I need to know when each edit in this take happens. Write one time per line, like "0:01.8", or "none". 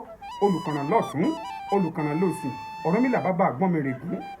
none